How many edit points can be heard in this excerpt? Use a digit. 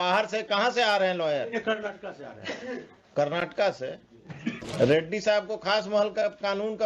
1